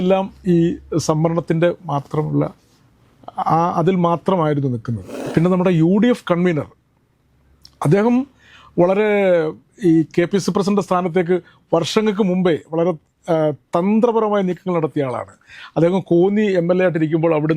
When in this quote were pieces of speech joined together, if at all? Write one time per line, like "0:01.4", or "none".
0:05.2